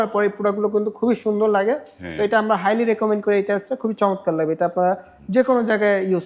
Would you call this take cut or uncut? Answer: uncut